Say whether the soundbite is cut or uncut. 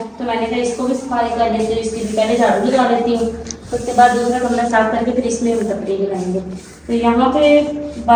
uncut